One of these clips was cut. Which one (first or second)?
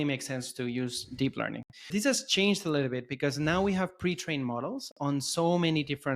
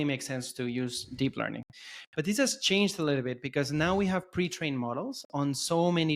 first